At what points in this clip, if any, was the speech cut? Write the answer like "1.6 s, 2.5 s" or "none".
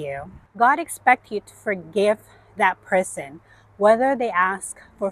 none